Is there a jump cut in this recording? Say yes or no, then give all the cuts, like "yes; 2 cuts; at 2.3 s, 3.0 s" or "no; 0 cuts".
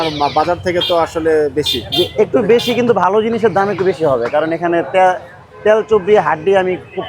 no; 0 cuts